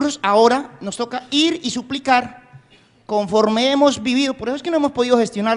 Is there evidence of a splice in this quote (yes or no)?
no